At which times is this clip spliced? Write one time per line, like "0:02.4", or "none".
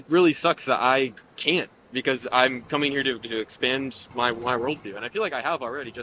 none